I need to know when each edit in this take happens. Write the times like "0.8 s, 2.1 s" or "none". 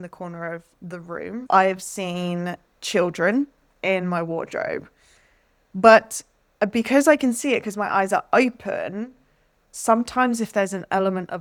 none